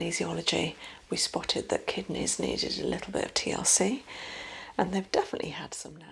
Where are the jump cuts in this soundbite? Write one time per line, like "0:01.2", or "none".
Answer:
none